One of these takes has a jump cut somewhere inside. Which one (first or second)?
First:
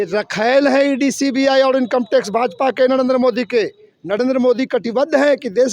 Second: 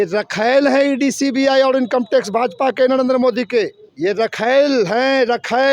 first